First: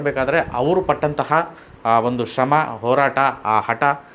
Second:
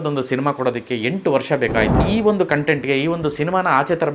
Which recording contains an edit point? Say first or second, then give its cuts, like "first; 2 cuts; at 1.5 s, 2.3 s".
second; 1 cut; at 2.0 s